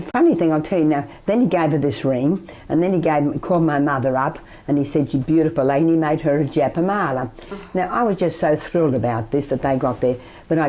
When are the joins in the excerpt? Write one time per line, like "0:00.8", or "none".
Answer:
none